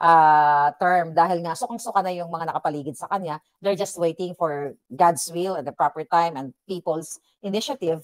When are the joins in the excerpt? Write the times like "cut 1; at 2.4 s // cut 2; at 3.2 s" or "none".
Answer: none